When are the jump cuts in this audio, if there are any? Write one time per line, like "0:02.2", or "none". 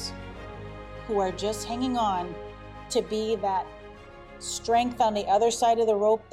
none